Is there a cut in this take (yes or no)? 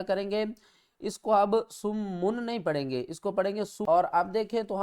yes